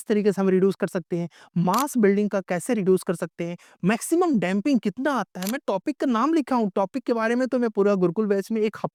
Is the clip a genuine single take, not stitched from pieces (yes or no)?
yes